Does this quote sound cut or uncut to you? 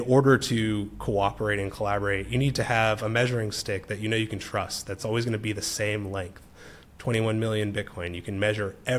uncut